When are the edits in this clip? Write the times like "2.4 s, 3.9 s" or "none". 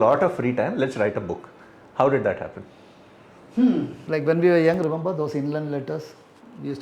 4.0 s